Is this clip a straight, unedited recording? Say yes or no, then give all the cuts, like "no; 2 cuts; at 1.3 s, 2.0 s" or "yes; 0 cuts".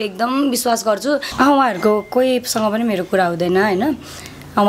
no; 1 cut; at 1.3 s